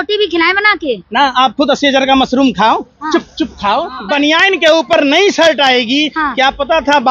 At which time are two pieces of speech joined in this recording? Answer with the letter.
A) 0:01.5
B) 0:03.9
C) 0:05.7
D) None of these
B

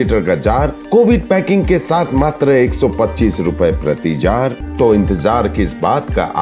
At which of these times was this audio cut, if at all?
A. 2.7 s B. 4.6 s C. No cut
B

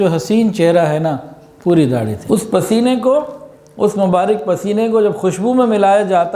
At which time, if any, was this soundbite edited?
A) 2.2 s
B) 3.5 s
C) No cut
A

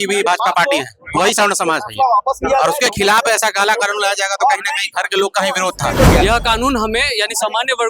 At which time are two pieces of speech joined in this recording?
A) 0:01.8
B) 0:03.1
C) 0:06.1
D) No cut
C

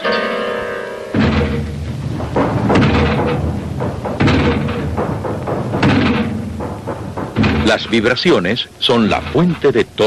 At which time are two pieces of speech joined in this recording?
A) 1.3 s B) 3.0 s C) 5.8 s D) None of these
B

